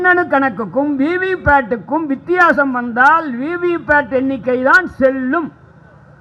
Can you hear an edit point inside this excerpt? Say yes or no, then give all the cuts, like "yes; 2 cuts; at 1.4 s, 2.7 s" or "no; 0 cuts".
no; 0 cuts